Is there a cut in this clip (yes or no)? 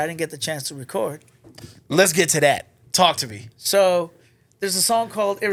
no